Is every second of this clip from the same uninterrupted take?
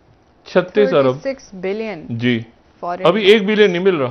yes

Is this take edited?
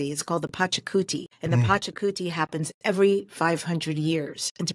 yes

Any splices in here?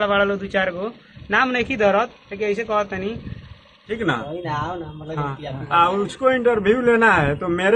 yes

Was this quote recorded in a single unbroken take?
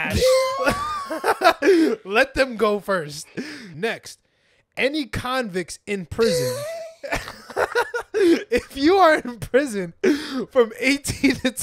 no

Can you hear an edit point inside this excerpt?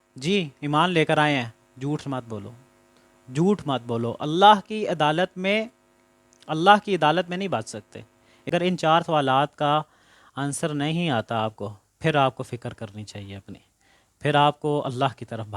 yes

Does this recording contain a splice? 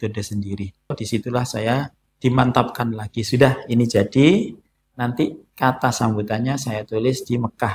yes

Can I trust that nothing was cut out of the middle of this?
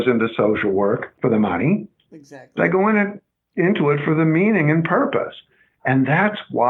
no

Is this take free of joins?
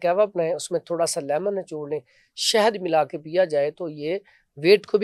yes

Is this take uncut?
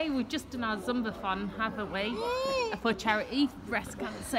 yes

